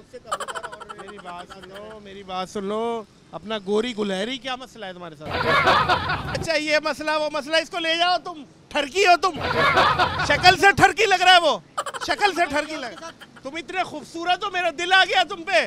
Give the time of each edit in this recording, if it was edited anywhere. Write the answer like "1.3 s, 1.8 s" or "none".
6.4 s

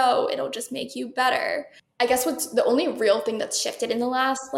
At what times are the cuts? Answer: 1.8 s

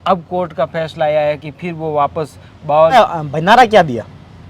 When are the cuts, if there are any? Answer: 2.9 s

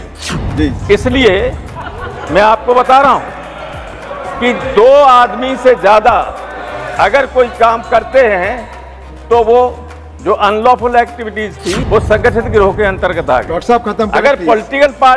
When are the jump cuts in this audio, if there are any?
11.7 s

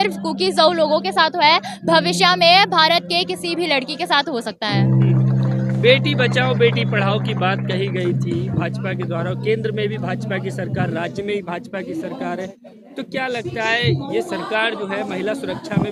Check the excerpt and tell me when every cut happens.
none

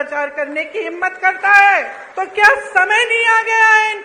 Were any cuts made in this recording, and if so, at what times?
2.0 s

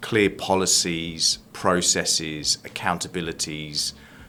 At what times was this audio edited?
none

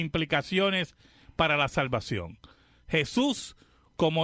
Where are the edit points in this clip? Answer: 1.6 s

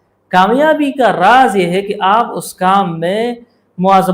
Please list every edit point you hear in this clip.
none

